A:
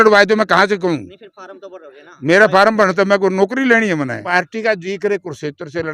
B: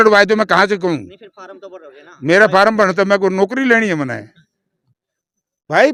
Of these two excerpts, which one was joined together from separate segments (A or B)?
A